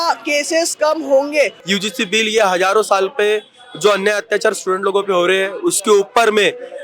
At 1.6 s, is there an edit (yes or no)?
yes